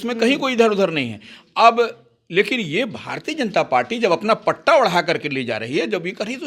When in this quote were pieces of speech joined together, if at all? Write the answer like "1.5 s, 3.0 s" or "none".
none